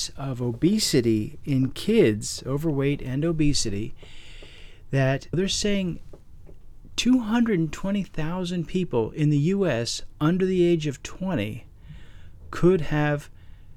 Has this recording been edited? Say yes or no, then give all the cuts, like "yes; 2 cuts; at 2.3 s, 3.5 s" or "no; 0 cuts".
yes; 1 cut; at 5.3 s